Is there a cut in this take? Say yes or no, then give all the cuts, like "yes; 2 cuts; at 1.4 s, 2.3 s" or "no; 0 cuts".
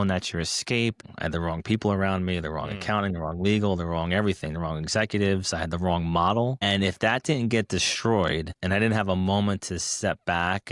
yes; 3 cuts; at 1.1 s, 6.6 s, 8.5 s